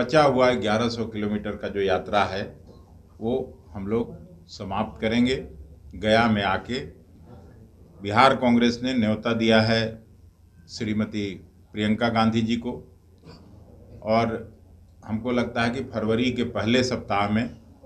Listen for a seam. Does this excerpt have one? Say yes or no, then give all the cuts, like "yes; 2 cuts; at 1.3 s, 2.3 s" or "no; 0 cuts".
no; 0 cuts